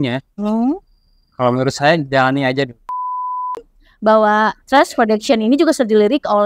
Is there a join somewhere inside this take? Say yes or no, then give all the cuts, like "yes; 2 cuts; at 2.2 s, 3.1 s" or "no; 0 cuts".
yes; 1 cut; at 3.4 s